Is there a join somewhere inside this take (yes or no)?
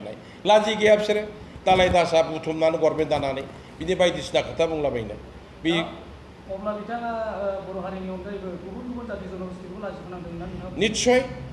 no